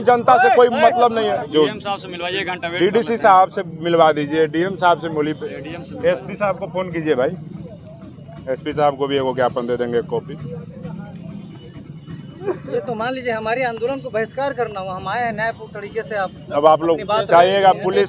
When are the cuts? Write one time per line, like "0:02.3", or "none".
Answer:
none